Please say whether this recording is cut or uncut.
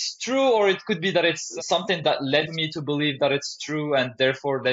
cut